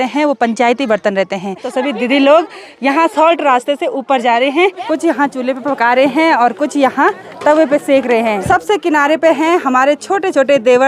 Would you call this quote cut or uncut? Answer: cut